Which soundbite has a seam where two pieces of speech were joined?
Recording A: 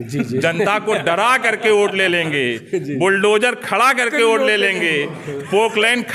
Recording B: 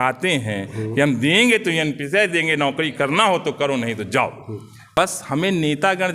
B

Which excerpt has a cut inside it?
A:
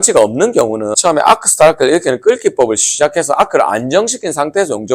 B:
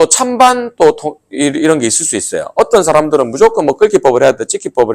A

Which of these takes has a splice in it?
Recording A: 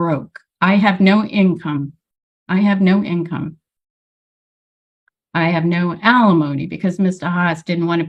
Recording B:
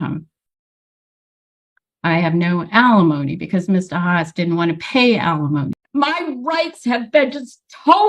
B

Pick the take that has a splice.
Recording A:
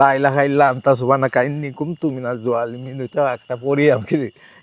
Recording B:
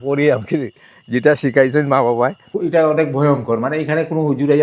B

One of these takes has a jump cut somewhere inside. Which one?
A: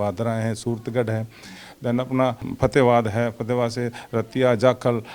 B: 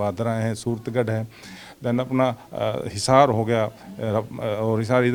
A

